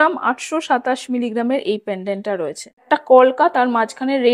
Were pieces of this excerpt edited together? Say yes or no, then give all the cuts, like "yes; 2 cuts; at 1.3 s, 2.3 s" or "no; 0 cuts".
yes; 1 cut; at 2.8 s